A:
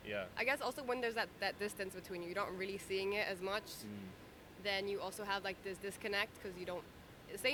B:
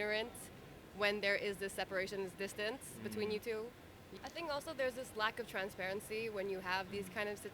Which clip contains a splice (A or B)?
B